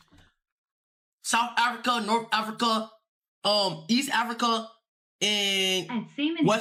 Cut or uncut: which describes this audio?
uncut